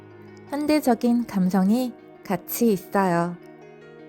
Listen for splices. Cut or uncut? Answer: uncut